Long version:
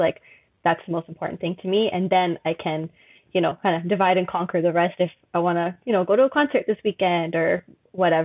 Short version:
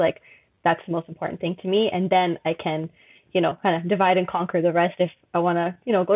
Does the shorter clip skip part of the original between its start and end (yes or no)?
no